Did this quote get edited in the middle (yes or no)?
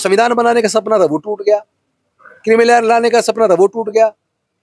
no